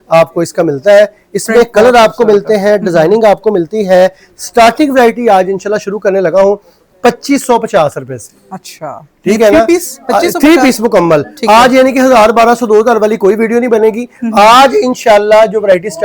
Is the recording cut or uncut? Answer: uncut